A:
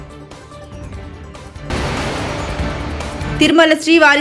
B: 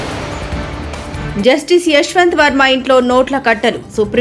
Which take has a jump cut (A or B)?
B